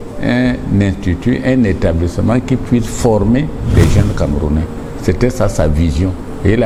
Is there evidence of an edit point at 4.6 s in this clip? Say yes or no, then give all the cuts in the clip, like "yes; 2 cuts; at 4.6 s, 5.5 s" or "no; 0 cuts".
no; 0 cuts